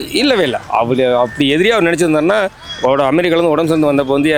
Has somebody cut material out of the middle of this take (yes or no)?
no